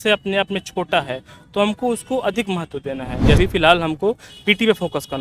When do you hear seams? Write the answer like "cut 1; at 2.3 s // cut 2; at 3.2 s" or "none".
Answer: cut 1; at 3.4 s